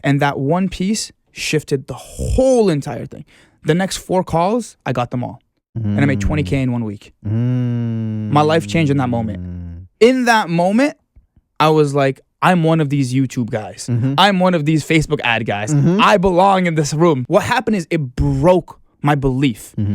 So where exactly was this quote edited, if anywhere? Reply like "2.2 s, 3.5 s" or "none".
17.2 s